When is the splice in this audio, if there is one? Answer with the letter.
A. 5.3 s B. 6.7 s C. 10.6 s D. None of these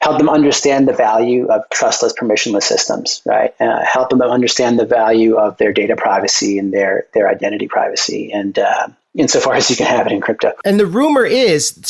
C